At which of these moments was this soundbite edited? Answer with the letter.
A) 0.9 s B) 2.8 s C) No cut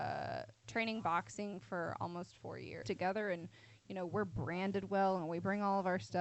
B